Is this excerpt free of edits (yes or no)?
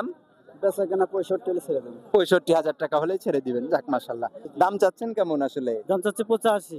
no